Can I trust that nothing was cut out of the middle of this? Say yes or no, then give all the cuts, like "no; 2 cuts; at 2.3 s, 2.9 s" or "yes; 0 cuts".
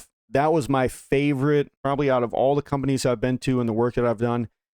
yes; 0 cuts